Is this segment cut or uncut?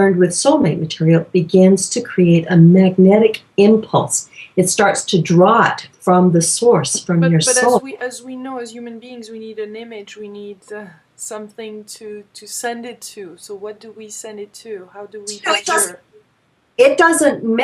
uncut